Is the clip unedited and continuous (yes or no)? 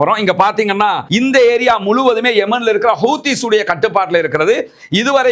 no